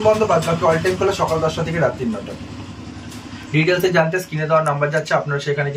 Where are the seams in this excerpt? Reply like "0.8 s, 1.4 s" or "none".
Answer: none